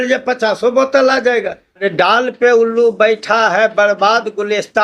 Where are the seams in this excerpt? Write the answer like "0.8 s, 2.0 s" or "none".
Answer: 1.8 s